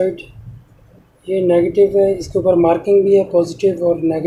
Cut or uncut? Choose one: uncut